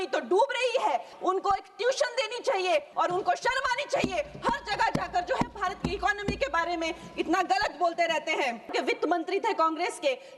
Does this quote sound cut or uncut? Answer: cut